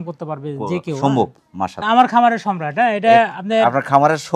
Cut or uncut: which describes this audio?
cut